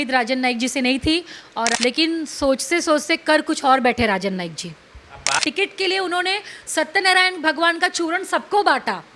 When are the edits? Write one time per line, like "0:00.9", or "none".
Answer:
0:01.7
0:05.4